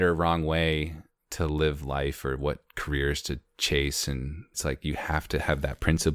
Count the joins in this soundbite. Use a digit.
1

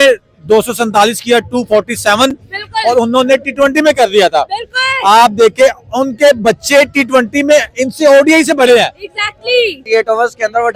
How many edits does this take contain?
1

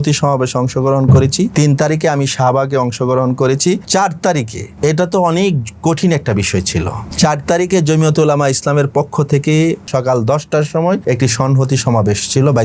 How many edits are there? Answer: 6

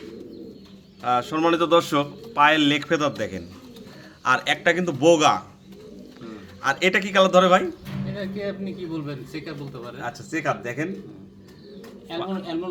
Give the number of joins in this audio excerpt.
0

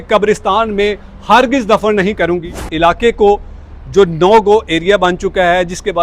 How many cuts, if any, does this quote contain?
1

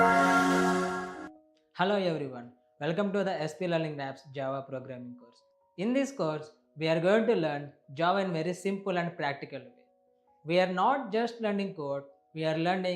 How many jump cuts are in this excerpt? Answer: 1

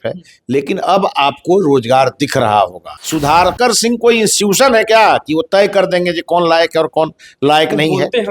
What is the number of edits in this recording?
1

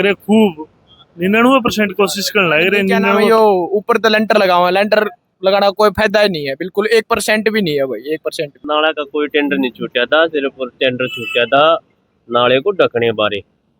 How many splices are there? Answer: 2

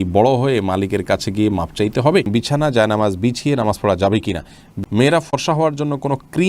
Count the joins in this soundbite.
2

